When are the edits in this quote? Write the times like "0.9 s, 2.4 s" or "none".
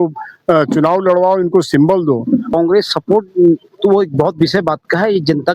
2.5 s